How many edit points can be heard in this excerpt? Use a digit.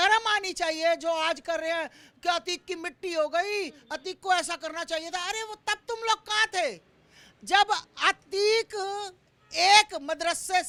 0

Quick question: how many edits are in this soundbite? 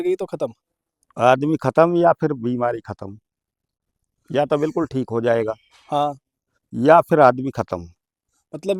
0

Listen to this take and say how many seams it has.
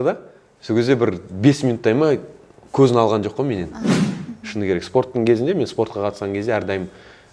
1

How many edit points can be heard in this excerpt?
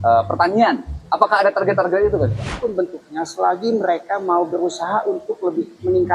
2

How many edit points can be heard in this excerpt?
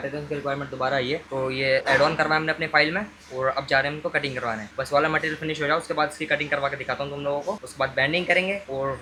0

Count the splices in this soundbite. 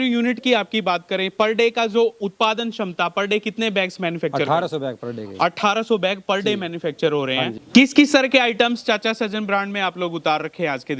1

